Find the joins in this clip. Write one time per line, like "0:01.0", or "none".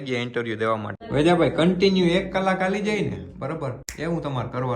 0:01.0
0:03.9